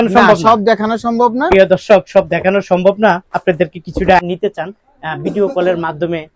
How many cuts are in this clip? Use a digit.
1